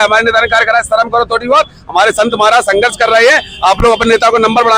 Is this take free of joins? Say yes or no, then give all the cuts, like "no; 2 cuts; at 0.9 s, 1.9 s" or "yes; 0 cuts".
yes; 0 cuts